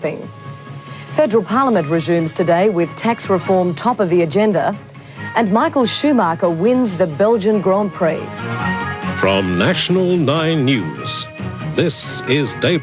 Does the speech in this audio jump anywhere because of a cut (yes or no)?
no